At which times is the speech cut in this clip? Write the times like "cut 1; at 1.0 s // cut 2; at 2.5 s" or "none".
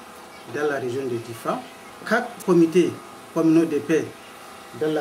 cut 1; at 2.4 s